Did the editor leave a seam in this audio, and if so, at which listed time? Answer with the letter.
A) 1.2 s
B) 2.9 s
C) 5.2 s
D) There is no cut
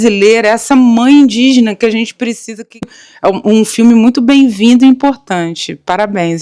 B